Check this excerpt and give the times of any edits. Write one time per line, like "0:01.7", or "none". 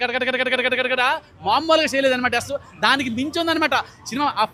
none